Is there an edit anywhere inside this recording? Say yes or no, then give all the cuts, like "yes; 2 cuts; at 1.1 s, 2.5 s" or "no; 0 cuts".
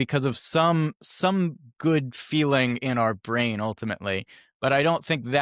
no; 0 cuts